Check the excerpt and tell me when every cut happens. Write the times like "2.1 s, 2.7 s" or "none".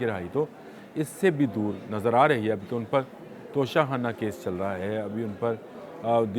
none

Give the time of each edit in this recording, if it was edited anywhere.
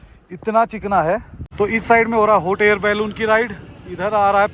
1.4 s

